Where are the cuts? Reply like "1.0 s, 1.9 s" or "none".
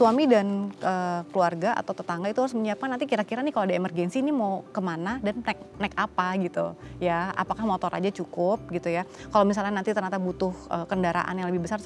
none